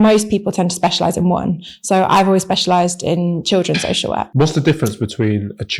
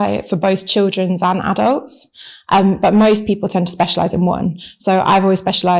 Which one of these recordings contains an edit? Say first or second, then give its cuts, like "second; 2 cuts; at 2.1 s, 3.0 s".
first; 1 cut; at 4.3 s